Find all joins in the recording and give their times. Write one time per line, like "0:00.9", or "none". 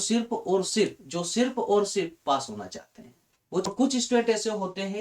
0:03.7